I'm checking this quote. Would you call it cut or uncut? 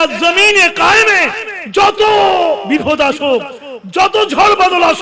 cut